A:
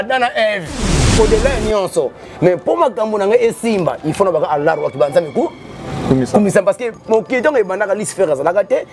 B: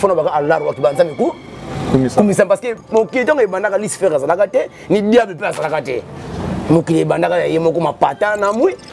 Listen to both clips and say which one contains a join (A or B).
A